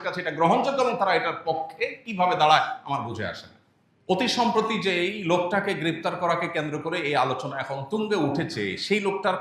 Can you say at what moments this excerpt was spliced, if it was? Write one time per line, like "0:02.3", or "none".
0:03.7